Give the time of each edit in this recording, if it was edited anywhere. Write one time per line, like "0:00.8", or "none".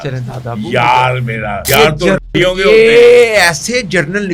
0:01.6